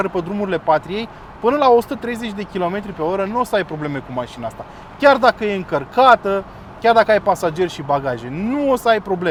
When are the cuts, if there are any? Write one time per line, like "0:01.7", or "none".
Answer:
none